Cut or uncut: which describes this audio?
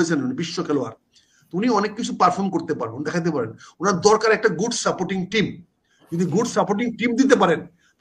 uncut